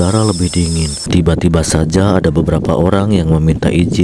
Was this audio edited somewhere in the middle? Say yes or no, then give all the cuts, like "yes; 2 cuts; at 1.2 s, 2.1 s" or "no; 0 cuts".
yes; 1 cut; at 1.0 s